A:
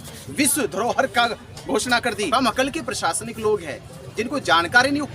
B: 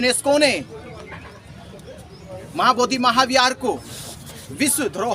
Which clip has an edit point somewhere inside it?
A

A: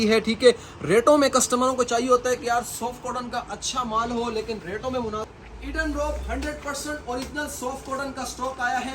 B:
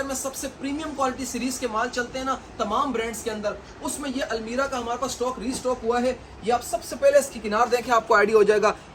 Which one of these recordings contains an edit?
A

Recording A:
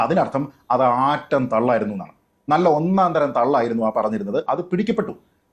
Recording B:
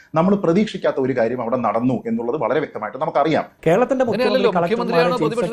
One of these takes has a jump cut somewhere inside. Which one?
B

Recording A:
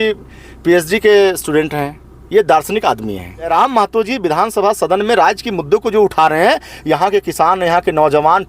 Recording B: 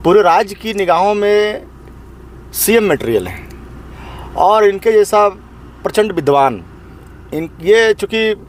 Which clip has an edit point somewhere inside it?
A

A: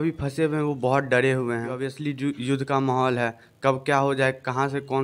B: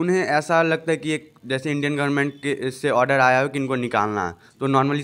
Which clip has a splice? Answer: A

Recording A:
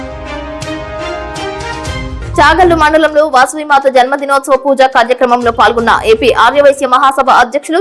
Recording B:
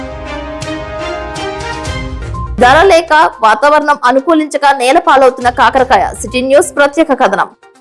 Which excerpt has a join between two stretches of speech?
A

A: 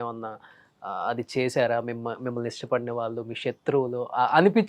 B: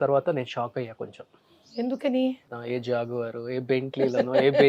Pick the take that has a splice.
B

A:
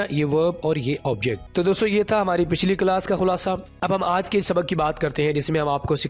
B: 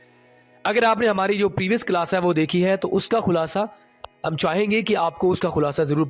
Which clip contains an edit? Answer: A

